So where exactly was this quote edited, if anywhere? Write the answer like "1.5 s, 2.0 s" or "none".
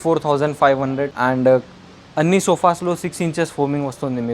1.1 s

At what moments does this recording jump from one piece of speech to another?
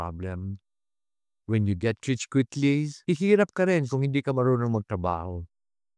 2.9 s

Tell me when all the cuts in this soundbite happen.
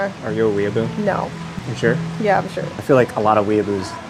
none

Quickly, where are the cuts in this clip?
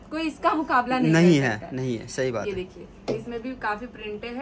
none

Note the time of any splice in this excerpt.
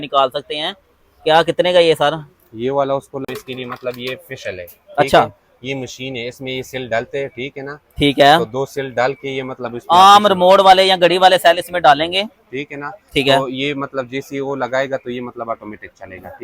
3.2 s

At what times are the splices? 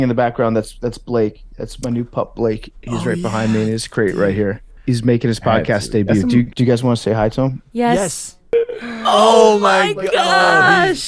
4.7 s, 6.5 s, 8.5 s

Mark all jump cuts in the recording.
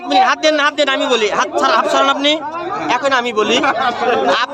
none

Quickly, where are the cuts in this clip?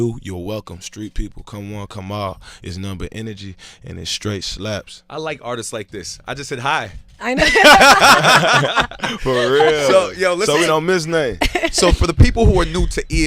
11.7 s

